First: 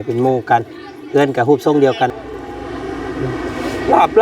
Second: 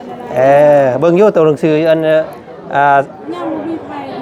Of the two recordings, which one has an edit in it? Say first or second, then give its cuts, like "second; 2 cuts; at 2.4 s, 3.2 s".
first; 1 cut; at 2.1 s